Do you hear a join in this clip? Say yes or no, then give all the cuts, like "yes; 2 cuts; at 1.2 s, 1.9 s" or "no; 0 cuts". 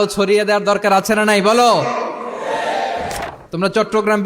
yes; 1 cut; at 3.1 s